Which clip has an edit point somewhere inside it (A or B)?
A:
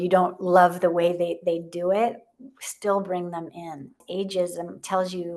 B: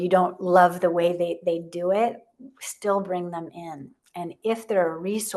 A